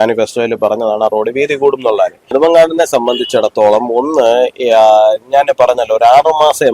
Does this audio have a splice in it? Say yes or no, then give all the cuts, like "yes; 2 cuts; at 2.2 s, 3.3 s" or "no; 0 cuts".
yes; 1 cut; at 2.3 s